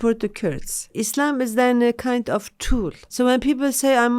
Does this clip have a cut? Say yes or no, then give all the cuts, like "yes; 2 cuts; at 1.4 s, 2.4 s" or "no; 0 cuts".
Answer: yes; 2 cuts; at 0.9 s, 3.0 s